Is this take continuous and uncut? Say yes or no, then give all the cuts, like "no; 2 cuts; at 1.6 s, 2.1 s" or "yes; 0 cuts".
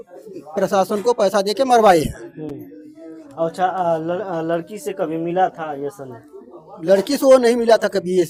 yes; 0 cuts